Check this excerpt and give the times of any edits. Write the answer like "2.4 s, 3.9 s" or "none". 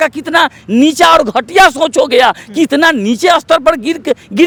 none